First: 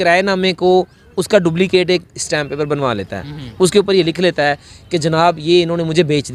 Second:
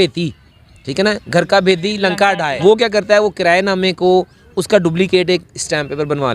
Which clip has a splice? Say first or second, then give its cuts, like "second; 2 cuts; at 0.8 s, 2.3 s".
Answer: second; 1 cut; at 2.5 s